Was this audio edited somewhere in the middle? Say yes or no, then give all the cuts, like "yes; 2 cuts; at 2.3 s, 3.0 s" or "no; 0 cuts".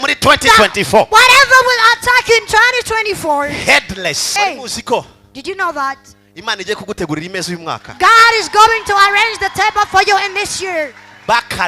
yes; 1 cut; at 4.2 s